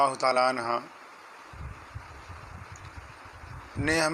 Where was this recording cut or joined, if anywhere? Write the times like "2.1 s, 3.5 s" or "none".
none